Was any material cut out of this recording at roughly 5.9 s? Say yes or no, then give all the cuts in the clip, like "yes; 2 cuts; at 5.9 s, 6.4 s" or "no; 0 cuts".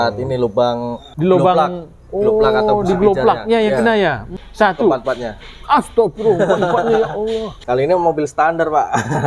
no; 3 cuts; at 1.0 s, 4.3 s, 7.6 s